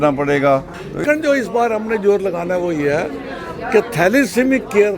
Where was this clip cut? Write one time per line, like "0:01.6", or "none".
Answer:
0:01.0